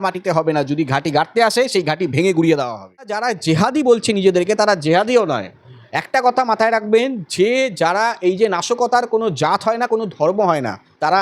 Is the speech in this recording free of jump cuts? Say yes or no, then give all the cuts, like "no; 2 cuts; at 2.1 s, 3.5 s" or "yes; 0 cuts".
no; 1 cut; at 3.3 s